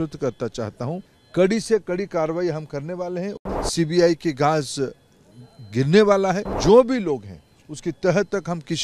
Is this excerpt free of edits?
no; 3 cuts; at 1.1 s, 3.4 s, 6.5 s

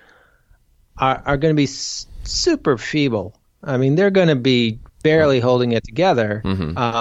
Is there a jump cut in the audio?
yes; 1 cut; at 4.8 s

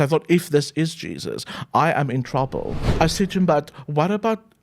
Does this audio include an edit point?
yes; 1 cut; at 2.8 s

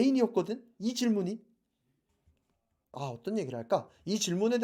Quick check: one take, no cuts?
no; 1 cut; at 2.9 s

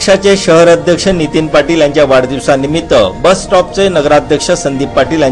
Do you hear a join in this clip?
no; 0 cuts

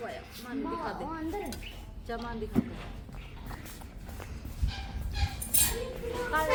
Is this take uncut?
yes; 0 cuts

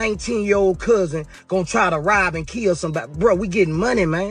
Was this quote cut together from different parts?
no; 0 cuts

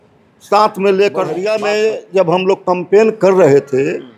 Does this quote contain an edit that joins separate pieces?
yes; 1 cut; at 1.4 s

